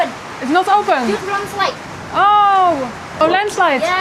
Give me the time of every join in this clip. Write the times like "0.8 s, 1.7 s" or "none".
3.0 s